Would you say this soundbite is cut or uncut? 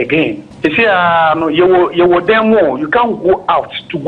uncut